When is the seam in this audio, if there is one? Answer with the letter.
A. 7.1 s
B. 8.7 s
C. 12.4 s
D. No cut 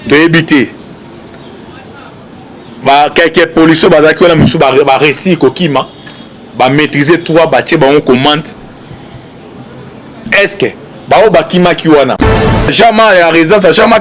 C